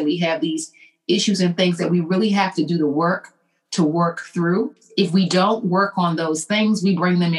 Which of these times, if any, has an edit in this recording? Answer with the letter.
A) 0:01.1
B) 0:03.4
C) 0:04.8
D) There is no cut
C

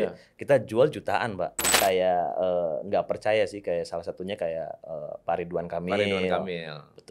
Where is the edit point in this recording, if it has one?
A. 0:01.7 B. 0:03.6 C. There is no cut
A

